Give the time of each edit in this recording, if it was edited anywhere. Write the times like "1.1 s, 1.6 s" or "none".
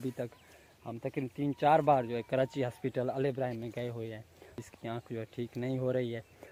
none